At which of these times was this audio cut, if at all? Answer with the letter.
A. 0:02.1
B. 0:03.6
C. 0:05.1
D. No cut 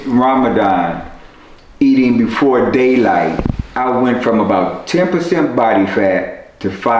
B